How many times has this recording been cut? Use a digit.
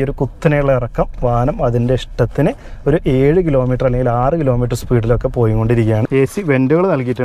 1